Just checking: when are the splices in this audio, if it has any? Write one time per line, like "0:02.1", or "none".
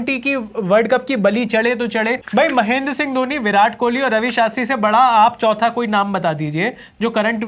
0:02.2